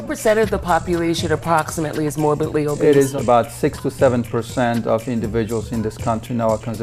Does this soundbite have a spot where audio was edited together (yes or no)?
yes